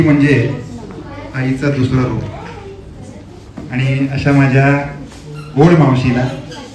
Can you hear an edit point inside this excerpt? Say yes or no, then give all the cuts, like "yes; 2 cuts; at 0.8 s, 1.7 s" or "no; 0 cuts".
no; 0 cuts